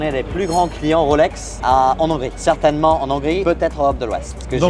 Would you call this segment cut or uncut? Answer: uncut